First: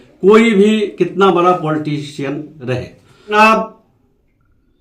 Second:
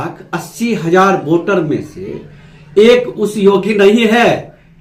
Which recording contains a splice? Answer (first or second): first